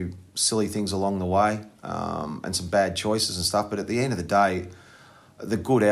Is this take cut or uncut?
uncut